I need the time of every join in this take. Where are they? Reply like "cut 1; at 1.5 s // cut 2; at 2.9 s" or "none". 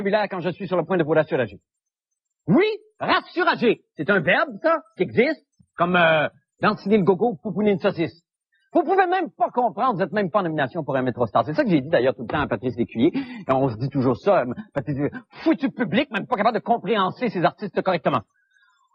cut 1; at 5.0 s